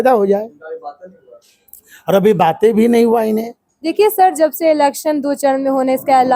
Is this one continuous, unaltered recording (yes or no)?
yes